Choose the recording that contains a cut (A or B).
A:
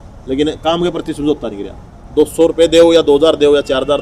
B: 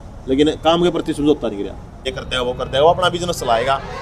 B